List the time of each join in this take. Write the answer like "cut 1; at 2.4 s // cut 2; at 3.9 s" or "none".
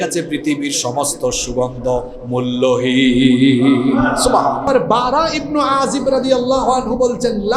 cut 1; at 4.7 s